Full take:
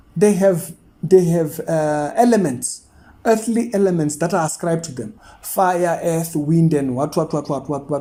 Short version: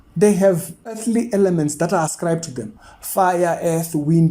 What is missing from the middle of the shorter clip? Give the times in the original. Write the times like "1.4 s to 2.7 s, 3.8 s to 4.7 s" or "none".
1.0 s to 3.4 s